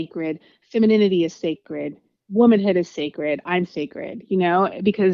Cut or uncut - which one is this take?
uncut